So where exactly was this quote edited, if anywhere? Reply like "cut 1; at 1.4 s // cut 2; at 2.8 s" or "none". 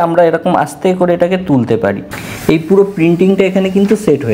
cut 1; at 2.1 s